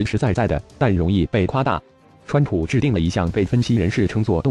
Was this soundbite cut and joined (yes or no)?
yes